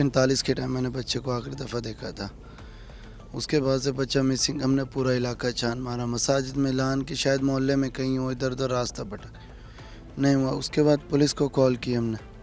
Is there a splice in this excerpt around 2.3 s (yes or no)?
no